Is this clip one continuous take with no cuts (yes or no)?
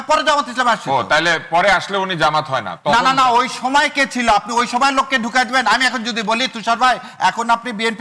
yes